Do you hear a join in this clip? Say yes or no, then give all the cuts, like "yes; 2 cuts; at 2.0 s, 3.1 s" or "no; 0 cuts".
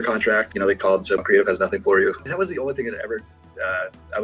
yes; 2 cuts; at 1.2 s, 2.3 s